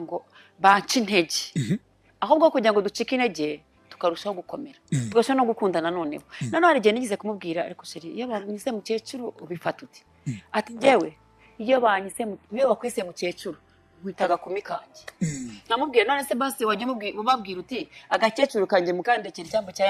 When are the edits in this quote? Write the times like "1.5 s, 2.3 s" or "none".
none